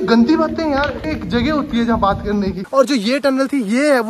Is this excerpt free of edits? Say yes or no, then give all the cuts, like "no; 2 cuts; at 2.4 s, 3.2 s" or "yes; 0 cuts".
no; 2 cuts; at 1.0 s, 2.6 s